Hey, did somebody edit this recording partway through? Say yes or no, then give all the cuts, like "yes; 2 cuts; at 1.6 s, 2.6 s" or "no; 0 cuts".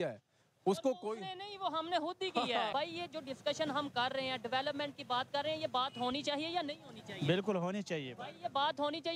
yes; 1 cut; at 2.7 s